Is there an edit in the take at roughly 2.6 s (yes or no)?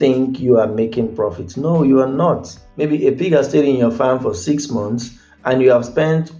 yes